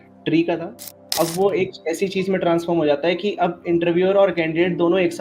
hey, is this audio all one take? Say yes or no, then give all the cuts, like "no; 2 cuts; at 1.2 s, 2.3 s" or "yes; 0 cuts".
no; 1 cut; at 1.1 s